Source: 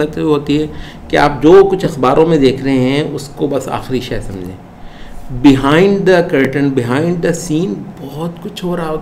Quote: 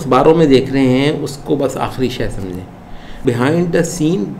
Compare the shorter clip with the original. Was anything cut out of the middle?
yes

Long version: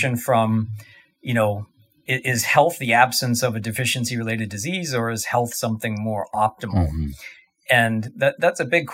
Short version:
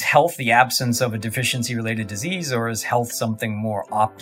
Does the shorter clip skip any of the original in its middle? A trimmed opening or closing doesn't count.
no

